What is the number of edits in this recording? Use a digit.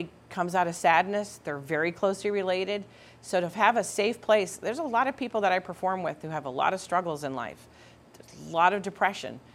0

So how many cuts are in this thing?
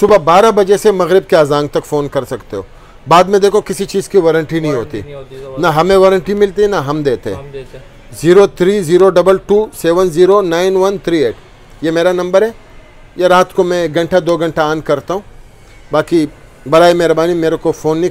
0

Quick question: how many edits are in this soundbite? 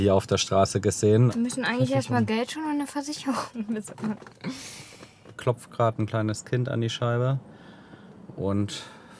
2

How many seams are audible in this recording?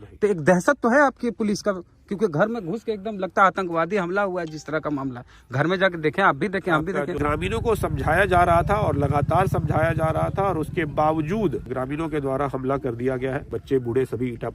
3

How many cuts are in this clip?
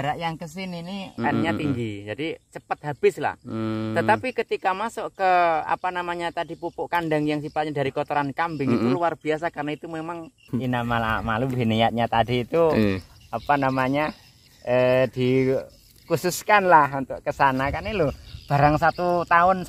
2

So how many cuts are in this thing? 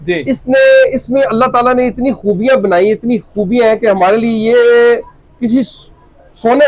0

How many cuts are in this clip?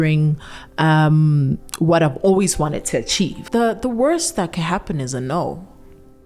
1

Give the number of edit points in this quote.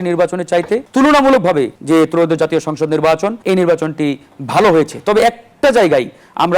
3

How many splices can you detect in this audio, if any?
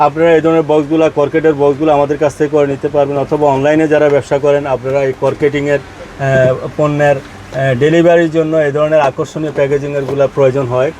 0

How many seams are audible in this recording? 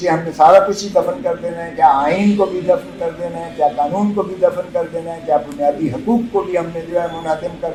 0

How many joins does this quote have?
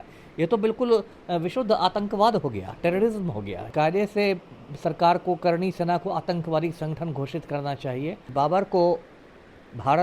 2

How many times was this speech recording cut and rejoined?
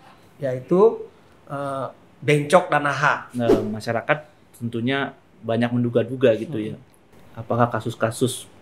1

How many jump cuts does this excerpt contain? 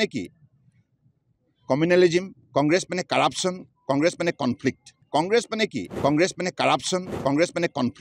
3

